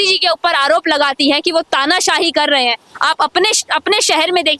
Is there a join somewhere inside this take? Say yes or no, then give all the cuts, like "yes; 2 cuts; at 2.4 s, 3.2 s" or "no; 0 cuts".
no; 0 cuts